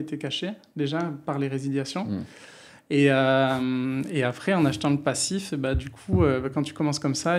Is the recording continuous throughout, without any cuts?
yes; 0 cuts

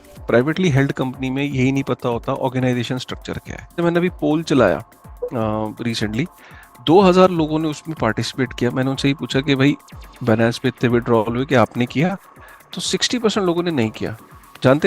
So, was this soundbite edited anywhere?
yes; 1 cut; at 3.8 s

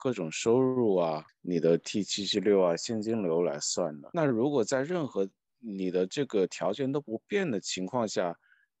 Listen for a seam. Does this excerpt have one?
no; 0 cuts

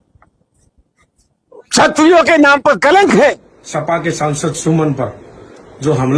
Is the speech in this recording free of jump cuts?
no; 1 cut; at 3.5 s

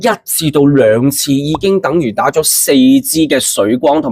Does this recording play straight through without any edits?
yes; 0 cuts

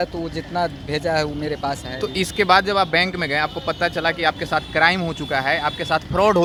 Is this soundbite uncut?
yes; 0 cuts

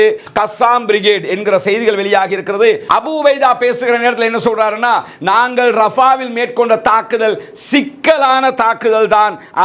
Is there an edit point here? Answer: yes; 1 cut; at 2.8 s

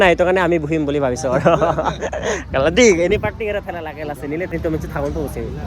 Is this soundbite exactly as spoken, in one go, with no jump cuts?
no; 1 cut; at 4.5 s

